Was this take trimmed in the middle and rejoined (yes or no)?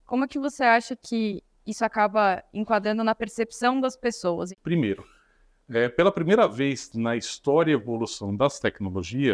yes